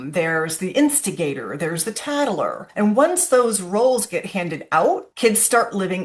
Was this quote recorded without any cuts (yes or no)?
no